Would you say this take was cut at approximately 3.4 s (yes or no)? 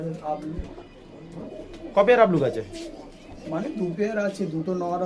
no